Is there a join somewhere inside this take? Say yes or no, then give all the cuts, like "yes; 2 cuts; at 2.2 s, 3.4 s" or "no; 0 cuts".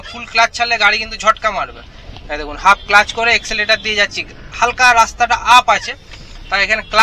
no; 0 cuts